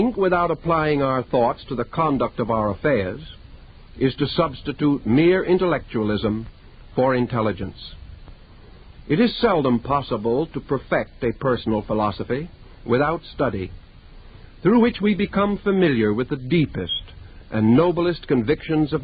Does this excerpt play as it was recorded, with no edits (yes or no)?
yes